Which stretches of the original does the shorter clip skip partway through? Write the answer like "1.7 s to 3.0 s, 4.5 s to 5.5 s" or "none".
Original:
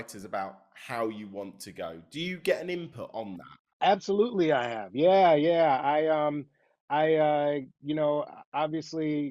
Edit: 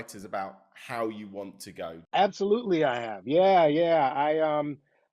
2.0 s to 3.7 s